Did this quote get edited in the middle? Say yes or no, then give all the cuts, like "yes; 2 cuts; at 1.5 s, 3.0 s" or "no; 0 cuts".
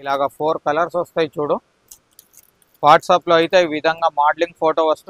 no; 0 cuts